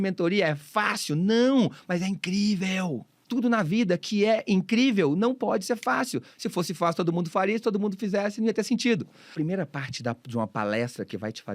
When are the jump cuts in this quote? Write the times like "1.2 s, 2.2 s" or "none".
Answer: 3.2 s, 9.3 s